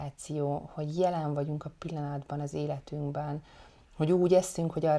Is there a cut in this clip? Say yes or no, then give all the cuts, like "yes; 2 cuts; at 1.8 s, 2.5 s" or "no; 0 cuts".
no; 0 cuts